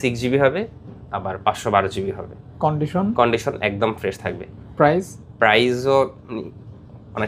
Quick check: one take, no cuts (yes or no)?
yes